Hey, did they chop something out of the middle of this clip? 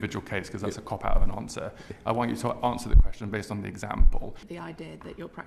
yes; 1 cut; at 4.4 s

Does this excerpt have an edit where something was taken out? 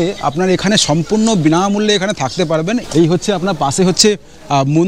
yes; 1 cut; at 2.8 s

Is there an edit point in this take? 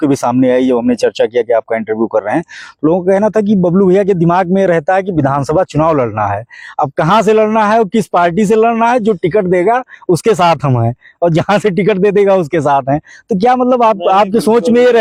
no; 0 cuts

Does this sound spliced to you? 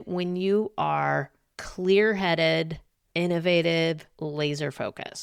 no; 0 cuts

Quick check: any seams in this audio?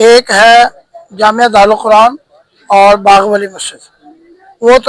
no; 0 cuts

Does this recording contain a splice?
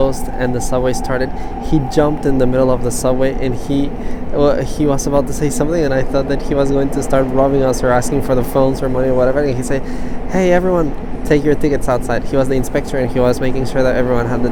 no; 0 cuts

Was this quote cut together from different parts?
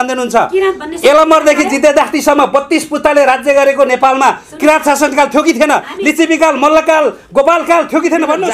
no; 0 cuts

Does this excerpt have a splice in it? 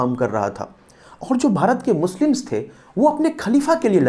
no; 0 cuts

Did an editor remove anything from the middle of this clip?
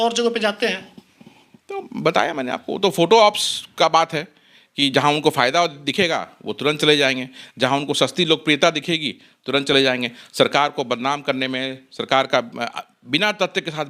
no; 0 cuts

